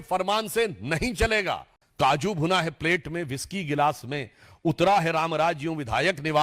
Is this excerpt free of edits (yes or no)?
no